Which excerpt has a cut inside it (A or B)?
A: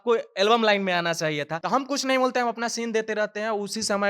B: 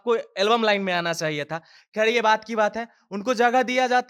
A